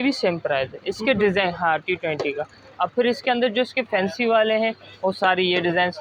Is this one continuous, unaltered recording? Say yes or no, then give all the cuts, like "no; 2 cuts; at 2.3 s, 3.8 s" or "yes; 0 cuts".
yes; 0 cuts